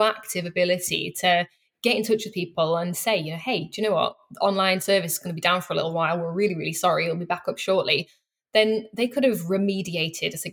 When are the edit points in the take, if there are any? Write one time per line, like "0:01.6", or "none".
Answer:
none